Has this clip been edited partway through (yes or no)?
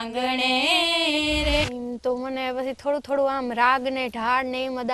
yes